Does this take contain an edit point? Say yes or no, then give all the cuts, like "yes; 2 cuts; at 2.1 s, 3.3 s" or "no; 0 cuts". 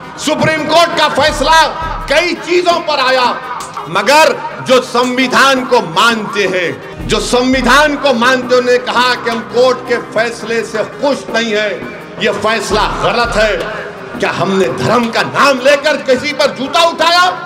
yes; 2 cuts; at 3.7 s, 6.9 s